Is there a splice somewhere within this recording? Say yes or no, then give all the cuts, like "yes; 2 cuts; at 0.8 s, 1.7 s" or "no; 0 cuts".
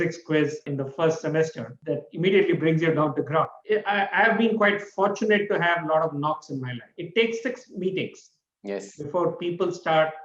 yes; 2 cuts; at 3.6 s, 6.9 s